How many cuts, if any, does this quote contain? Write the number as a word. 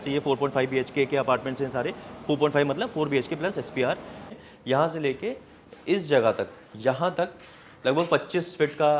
one